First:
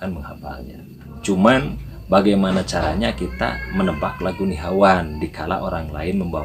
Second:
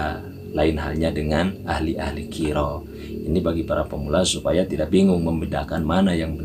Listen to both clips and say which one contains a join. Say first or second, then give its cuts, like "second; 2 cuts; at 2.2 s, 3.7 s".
first; 1 cut; at 1.1 s